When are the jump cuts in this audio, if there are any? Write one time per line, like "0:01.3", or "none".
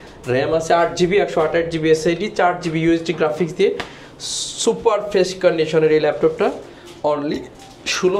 none